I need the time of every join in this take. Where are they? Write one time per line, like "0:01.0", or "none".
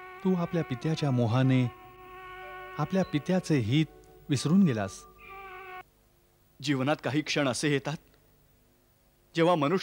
0:05.8